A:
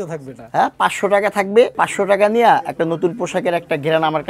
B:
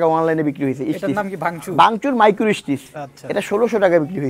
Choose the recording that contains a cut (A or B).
A